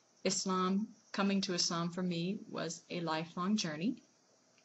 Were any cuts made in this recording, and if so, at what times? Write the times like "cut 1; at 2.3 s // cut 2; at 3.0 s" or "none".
cut 1; at 2.0 s